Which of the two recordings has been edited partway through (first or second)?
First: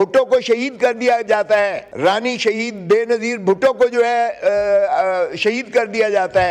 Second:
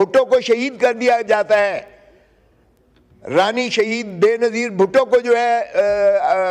first